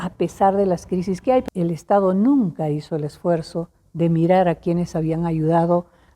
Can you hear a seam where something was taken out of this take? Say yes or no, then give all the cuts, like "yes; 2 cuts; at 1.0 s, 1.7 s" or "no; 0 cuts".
yes; 1 cut; at 1.5 s